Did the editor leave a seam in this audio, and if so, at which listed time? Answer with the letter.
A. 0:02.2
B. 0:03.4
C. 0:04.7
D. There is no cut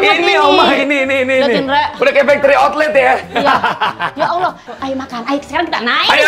C